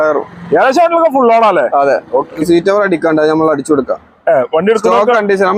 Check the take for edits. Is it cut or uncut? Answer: cut